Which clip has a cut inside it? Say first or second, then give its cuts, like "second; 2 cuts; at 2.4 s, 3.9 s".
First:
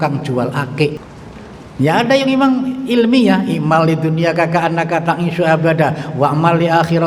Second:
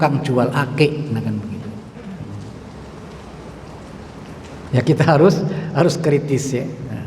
first; 1 cut; at 1.0 s